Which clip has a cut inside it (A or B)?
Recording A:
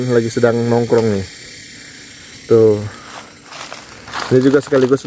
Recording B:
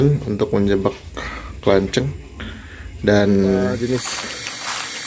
B